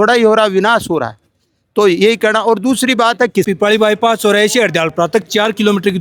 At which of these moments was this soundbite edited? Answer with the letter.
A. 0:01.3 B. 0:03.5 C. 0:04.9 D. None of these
B